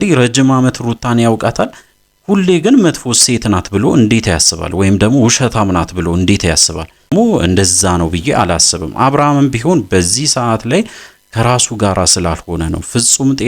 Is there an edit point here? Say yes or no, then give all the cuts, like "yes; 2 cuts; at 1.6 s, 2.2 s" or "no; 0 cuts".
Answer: yes; 1 cut; at 7.1 s